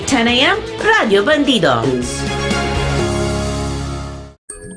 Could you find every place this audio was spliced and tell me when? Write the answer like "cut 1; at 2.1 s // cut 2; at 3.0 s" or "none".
cut 1; at 1.8 s